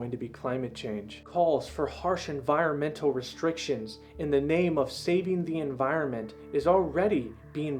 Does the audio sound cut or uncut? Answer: cut